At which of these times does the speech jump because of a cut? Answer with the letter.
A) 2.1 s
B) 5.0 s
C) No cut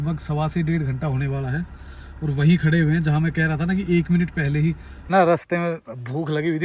B